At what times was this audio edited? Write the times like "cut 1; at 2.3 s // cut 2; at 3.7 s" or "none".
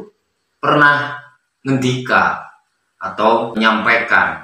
cut 1; at 3.5 s